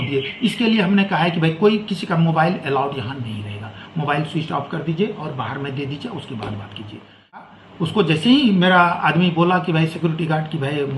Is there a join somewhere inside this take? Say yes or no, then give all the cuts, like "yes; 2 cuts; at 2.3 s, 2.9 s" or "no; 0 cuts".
yes; 1 cut; at 7.5 s